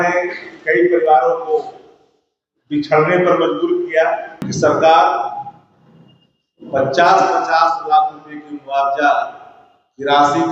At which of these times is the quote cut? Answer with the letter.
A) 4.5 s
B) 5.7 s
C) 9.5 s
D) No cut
A